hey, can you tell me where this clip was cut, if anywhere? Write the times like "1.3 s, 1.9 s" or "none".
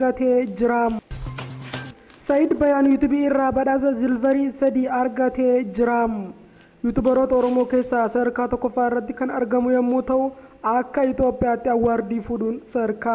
0.9 s